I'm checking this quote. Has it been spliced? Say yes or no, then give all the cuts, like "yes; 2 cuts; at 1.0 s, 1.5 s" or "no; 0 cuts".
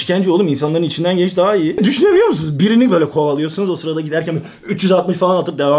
yes; 1 cut; at 1.8 s